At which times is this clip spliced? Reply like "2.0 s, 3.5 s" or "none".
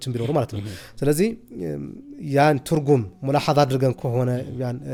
none